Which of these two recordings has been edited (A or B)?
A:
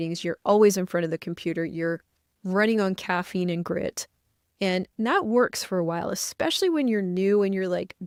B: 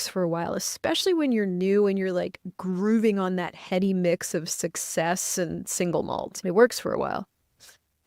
B